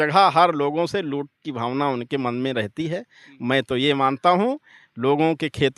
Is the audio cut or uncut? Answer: uncut